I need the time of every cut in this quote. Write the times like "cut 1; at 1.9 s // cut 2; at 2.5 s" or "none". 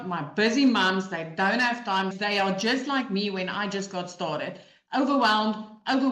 cut 1; at 2.1 s